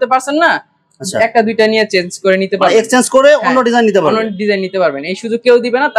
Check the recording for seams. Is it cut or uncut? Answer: uncut